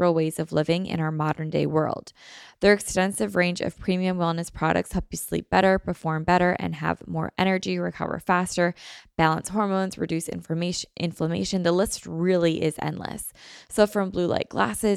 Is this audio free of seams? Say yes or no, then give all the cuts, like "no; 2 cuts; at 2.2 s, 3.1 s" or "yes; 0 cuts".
yes; 0 cuts